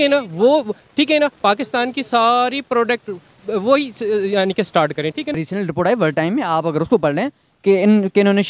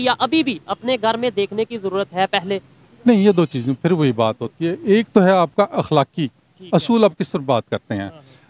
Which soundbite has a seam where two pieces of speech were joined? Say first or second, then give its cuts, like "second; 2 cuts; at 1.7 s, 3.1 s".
first; 1 cut; at 5.4 s